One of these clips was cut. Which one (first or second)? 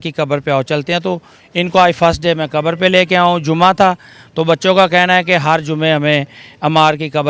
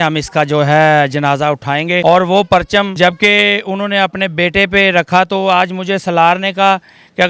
second